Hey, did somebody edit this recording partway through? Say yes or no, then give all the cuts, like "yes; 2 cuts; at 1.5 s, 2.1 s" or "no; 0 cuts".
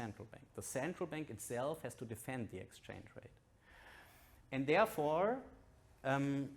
no; 0 cuts